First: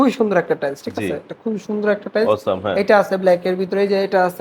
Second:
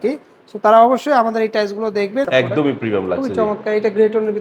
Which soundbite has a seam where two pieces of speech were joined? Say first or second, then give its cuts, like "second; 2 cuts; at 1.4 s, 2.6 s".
second; 1 cut; at 2.2 s